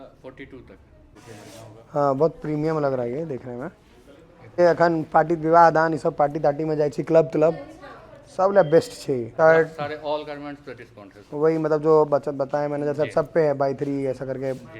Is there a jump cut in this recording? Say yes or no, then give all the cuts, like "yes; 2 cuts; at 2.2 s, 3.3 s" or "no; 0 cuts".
yes; 3 cuts; at 1.1 s, 4.6 s, 9.3 s